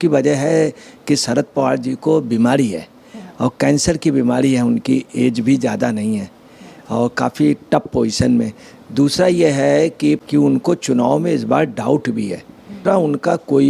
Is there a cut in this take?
yes; 2 cuts; at 10.2 s, 12.8 s

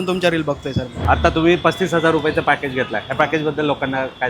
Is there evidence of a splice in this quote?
yes; 1 cut; at 0.9 s

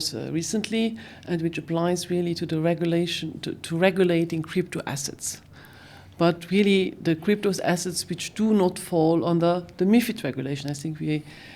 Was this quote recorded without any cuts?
yes; 0 cuts

